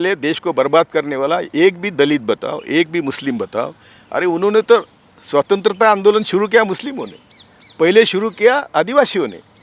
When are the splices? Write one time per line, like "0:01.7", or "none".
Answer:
none